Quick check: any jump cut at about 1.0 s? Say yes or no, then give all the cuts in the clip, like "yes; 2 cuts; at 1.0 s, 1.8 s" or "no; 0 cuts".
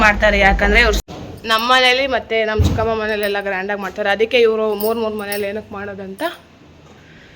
yes; 1 cut; at 1.0 s